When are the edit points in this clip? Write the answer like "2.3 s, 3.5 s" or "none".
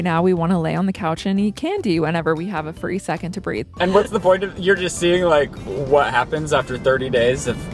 3.7 s